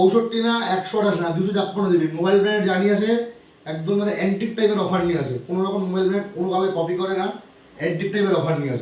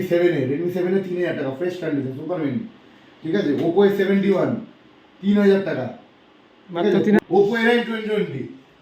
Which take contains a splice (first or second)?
second